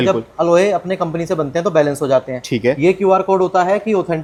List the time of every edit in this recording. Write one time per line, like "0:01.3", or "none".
none